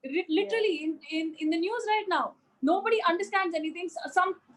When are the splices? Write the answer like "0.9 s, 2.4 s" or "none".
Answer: none